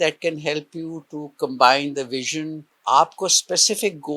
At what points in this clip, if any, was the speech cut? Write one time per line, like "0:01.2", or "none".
0:02.6